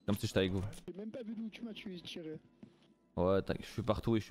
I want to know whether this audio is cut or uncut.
uncut